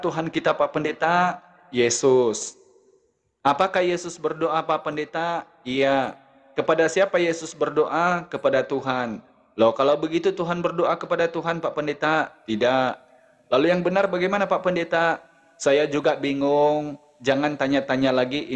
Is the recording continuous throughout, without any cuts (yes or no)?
yes